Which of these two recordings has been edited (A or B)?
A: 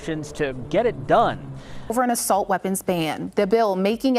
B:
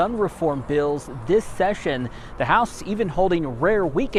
A